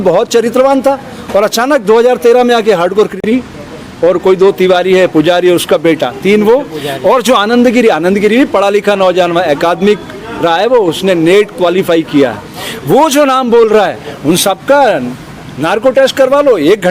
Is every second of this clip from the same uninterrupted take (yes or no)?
no